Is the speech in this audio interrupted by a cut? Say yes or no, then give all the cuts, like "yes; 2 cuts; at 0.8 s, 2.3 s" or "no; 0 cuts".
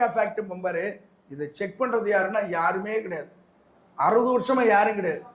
no; 0 cuts